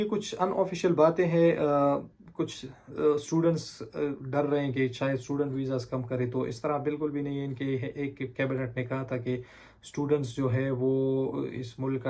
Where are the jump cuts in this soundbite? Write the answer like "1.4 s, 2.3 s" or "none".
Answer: none